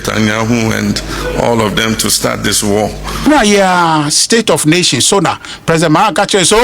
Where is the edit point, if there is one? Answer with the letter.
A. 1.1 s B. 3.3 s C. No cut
B